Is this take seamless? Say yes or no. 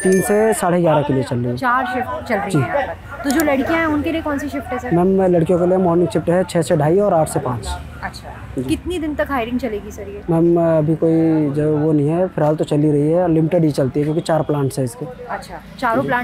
yes